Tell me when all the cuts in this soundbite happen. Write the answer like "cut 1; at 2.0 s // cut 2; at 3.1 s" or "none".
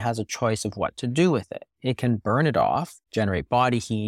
cut 1; at 3.0 s